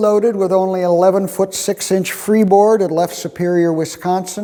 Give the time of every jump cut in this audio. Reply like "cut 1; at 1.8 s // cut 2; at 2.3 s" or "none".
none

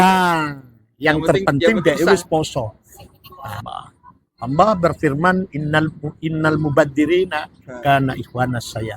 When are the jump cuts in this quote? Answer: cut 1; at 3.6 s

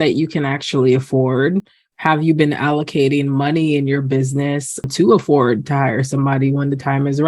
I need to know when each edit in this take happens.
cut 1; at 4.8 s

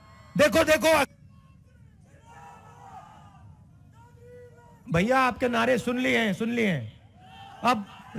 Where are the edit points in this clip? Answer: cut 1; at 1.1 s

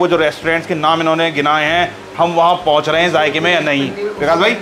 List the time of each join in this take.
none

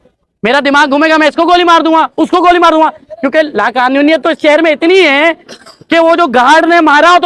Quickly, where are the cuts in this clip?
none

